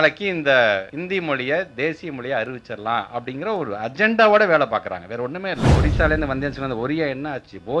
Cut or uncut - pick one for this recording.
cut